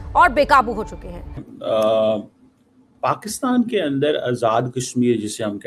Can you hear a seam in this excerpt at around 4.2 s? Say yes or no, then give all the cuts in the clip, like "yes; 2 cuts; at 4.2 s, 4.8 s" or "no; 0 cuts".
no; 1 cut; at 1.4 s